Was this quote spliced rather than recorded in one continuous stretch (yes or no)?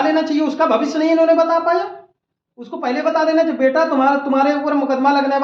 no